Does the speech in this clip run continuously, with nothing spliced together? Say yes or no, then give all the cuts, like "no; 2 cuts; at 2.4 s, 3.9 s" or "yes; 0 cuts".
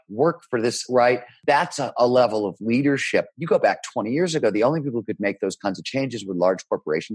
no; 1 cut; at 1.3 s